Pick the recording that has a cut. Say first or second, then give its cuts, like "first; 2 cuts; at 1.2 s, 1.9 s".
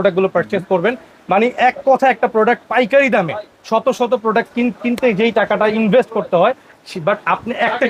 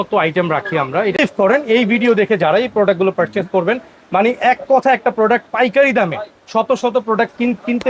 second; 1 cut; at 1.2 s